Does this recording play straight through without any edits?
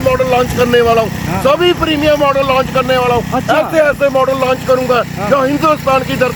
yes; 0 cuts

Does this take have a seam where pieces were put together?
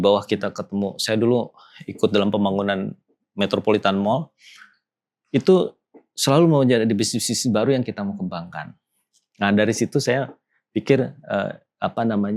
no; 0 cuts

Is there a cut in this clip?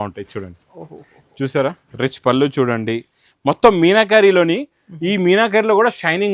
no; 0 cuts

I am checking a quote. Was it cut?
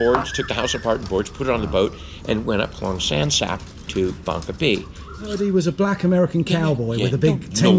yes; 1 cut; at 5.3 s

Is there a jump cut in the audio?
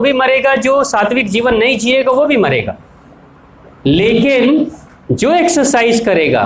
no; 0 cuts

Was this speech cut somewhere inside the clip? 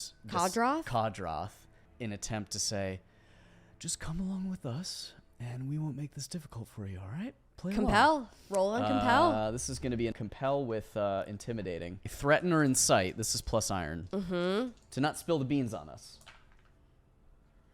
yes; 4 cuts; at 1.8 s, 10.2 s, 12.1 s, 14.8 s

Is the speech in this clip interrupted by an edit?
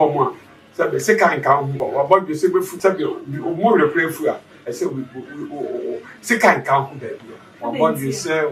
yes; 2 cuts; at 1.8 s, 2.7 s

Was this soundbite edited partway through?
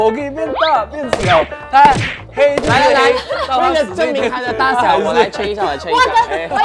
no; 0 cuts

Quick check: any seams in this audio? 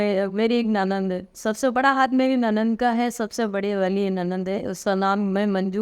no; 0 cuts

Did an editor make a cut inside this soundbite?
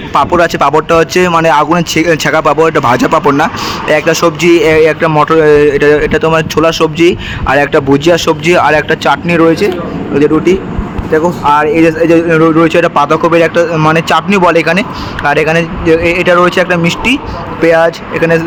no; 0 cuts

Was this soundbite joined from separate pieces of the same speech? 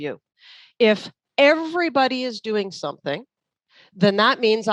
no; 0 cuts

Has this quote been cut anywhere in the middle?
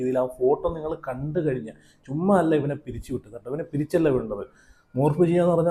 no; 0 cuts

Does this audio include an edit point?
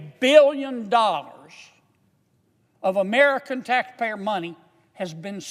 no; 0 cuts

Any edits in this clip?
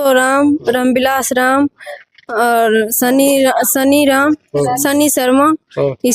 no; 0 cuts

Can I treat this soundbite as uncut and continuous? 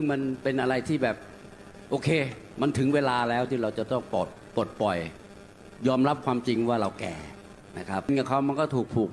no; 1 cut; at 8.1 s

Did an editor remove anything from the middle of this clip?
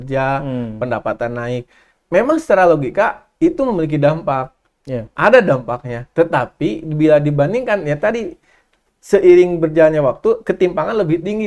no; 0 cuts

